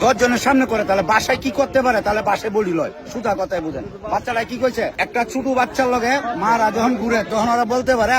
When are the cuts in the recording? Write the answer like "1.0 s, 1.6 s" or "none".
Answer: 5.0 s